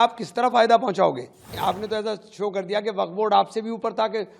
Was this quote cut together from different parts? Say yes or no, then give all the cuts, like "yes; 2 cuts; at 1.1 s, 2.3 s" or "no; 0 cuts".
yes; 1 cut; at 1.5 s